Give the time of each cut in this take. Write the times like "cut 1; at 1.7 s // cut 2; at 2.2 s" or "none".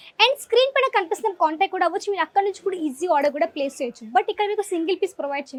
none